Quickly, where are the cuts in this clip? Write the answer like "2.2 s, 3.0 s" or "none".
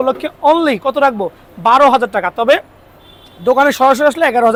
none